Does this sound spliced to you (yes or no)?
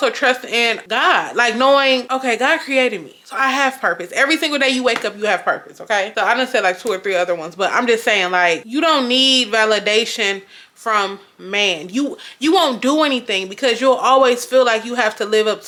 no